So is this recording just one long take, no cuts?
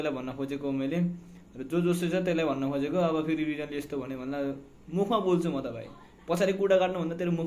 yes; 0 cuts

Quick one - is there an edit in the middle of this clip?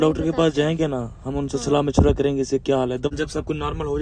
yes; 1 cut; at 3.1 s

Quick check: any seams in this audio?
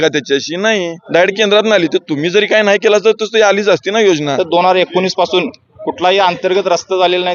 yes; 2 cuts; at 1.0 s, 4.3 s

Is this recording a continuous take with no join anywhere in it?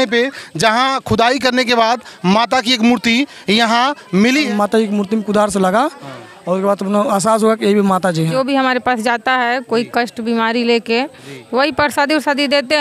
no; 2 cuts; at 4.5 s, 8.3 s

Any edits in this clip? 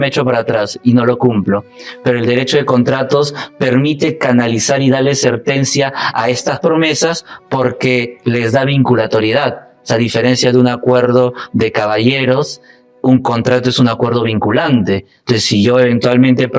no; 0 cuts

